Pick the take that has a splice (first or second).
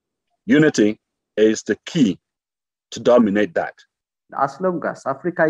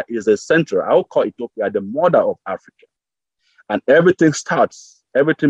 first